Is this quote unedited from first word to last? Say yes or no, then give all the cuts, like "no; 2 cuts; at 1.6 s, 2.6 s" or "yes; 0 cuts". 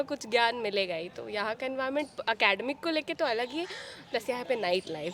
yes; 0 cuts